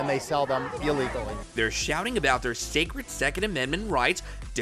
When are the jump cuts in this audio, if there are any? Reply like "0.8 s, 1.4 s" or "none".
none